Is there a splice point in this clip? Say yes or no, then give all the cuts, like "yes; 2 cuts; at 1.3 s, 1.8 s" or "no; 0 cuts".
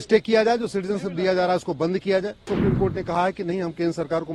yes; 1 cut; at 2.5 s